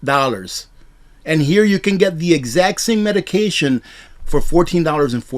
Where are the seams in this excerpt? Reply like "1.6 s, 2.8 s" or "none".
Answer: 4.0 s